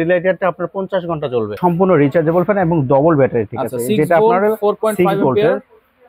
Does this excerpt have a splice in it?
yes; 1 cut; at 1.6 s

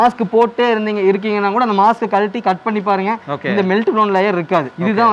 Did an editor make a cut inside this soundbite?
no; 0 cuts

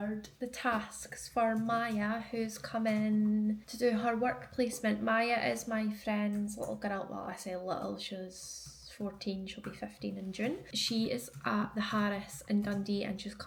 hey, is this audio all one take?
yes; 0 cuts

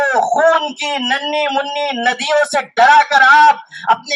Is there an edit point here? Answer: no; 0 cuts

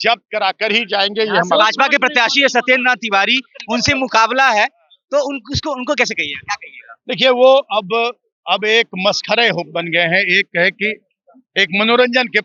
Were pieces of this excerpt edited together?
no; 0 cuts

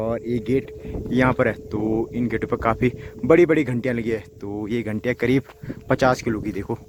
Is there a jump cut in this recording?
no; 0 cuts

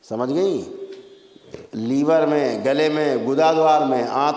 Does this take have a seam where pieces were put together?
no; 0 cuts

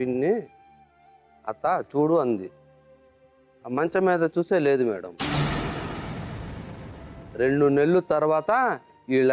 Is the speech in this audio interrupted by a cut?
yes; 2 cuts; at 5.2 s, 7.1 s

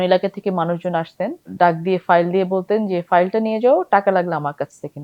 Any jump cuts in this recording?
yes; 1 cut; at 1.5 s

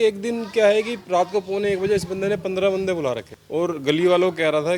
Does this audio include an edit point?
yes; 1 cut; at 3.3 s

